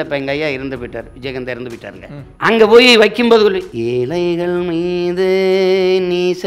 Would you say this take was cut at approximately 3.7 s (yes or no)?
yes